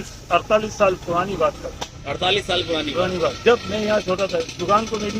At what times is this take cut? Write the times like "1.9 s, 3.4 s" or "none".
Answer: none